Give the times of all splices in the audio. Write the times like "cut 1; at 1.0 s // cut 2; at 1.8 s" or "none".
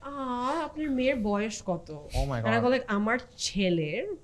none